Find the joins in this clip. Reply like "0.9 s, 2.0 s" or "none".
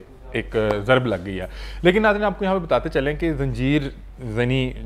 none